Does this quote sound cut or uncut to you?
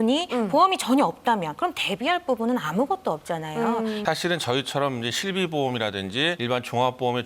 cut